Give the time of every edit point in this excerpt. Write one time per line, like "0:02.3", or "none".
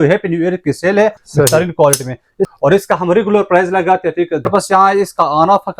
0:01.2
0:02.5
0:04.5